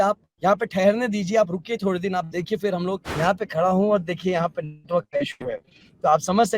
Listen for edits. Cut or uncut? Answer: cut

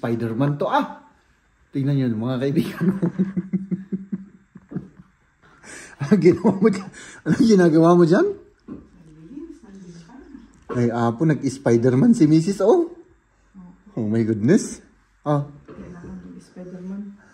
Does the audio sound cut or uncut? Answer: uncut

